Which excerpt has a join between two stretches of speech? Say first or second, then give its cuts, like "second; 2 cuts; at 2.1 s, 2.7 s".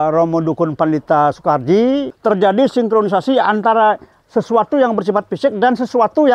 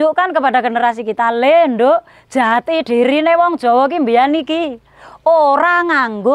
first; 1 cut; at 2.1 s